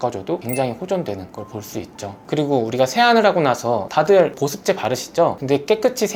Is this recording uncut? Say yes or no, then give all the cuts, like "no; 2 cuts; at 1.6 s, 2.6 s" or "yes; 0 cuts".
yes; 0 cuts